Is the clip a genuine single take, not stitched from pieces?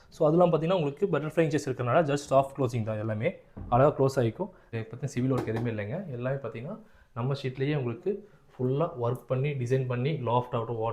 no; 1 cut; at 4.7 s

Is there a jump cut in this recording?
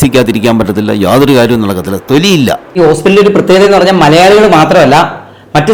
yes; 1 cut; at 2.6 s

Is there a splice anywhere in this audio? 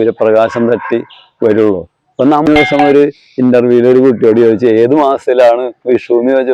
yes; 1 cut; at 2.5 s

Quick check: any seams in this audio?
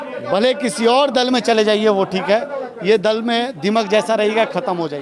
no; 0 cuts

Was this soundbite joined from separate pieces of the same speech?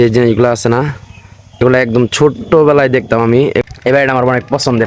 yes; 1 cut; at 3.6 s

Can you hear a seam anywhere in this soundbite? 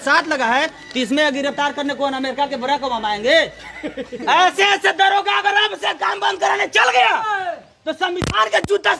yes; 1 cut; at 4.2 s

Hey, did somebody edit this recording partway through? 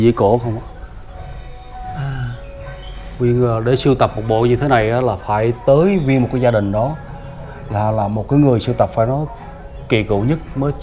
no; 0 cuts

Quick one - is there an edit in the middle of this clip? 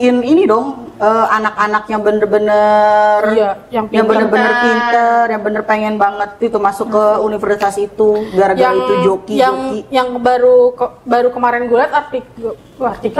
no; 0 cuts

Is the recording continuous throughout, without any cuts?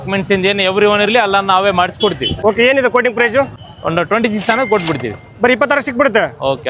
no; 2 cuts; at 2.3 s, 3.6 s

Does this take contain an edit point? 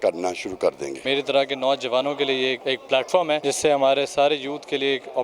yes; 3 cuts; at 0.9 s, 2.6 s, 3.4 s

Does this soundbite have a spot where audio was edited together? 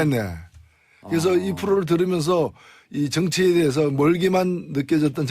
yes; 1 cut; at 4.2 s

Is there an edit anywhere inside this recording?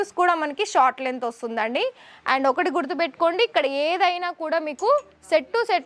no; 0 cuts

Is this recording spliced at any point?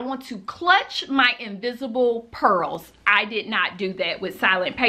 no; 0 cuts

